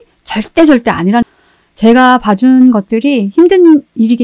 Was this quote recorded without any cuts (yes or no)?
no